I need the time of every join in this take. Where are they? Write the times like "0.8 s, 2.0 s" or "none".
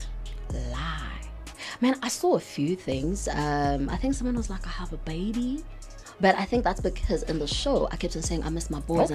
none